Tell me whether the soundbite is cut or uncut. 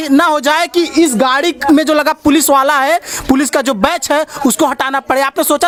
uncut